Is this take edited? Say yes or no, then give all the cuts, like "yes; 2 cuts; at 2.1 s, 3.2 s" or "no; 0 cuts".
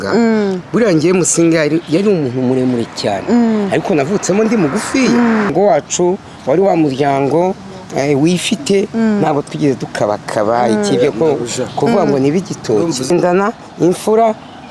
yes; 2 cuts; at 5.5 s, 13.1 s